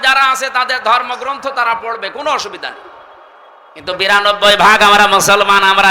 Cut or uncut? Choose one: uncut